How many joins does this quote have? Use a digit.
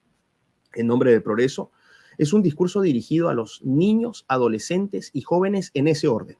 0